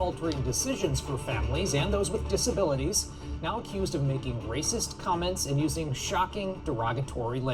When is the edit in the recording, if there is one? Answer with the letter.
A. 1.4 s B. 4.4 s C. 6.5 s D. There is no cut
D